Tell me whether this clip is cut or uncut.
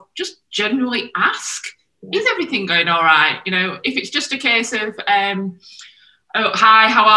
uncut